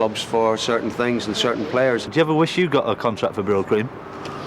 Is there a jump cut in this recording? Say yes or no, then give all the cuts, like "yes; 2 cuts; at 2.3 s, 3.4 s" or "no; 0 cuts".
yes; 1 cut; at 2.1 s